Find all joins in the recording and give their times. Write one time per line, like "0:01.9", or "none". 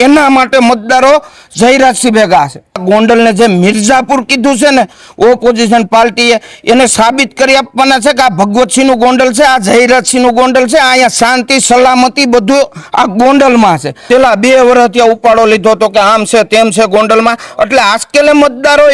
0:02.8
0:13.9